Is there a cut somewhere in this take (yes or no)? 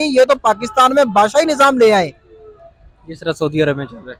no